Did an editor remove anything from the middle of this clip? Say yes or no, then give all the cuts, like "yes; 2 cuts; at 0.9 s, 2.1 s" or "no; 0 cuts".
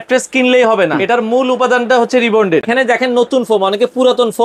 yes; 2 cuts; at 1.0 s, 2.7 s